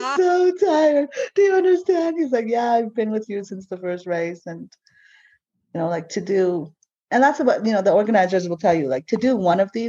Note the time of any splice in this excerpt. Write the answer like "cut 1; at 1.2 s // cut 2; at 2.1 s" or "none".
none